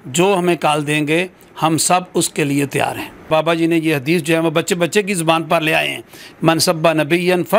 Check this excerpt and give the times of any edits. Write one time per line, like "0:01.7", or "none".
0:03.1